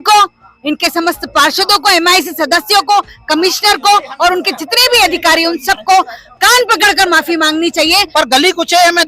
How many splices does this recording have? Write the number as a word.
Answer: one